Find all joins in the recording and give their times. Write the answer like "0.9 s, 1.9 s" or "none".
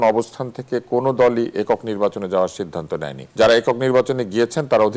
3.2 s